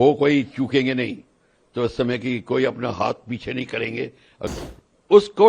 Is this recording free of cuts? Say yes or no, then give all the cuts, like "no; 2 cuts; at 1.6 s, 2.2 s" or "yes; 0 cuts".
no; 1 cut; at 4.5 s